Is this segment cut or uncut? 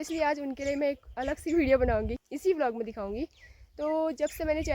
cut